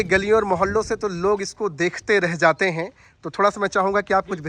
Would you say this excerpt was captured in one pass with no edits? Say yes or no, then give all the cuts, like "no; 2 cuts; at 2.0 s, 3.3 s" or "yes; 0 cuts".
yes; 0 cuts